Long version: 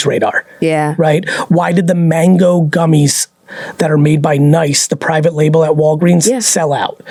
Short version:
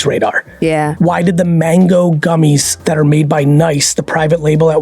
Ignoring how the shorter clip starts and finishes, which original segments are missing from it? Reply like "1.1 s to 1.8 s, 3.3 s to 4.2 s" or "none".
0.9 s to 1.4 s, 3.2 s to 3.7 s

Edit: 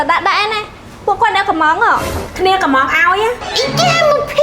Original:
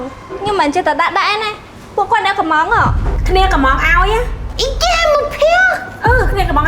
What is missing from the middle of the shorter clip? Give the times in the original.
4.4 s to 4.5 s

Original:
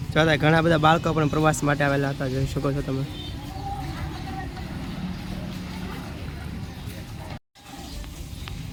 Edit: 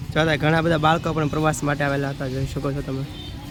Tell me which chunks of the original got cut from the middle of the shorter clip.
none

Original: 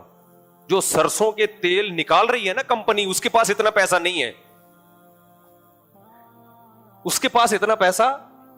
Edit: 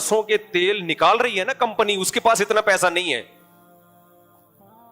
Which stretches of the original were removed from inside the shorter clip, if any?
4.4 s to 4.7 s

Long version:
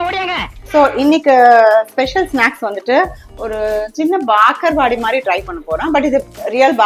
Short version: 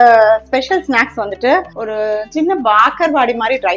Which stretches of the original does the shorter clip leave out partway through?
3.2 s to 3.4 s

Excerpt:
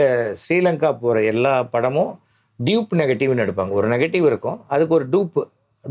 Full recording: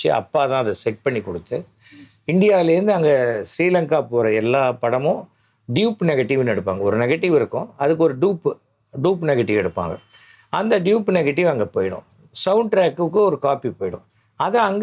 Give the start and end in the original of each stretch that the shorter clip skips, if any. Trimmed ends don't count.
none

